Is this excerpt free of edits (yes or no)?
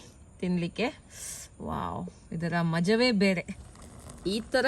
no